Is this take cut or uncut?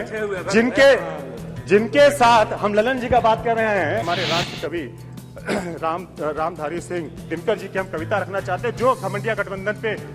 cut